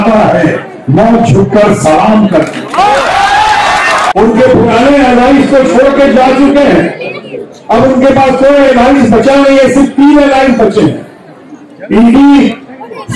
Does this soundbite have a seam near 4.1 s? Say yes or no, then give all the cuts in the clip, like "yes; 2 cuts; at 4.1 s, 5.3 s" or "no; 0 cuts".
yes; 1 cut; at 4.1 s